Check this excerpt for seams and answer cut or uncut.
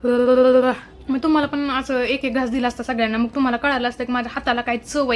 cut